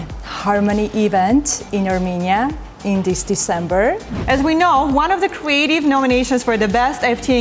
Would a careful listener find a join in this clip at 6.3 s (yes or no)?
no